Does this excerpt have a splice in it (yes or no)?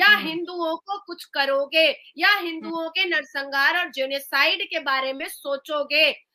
no